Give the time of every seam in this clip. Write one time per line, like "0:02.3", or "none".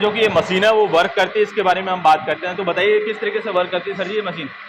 none